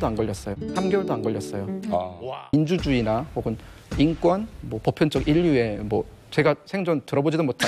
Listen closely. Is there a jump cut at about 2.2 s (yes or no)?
yes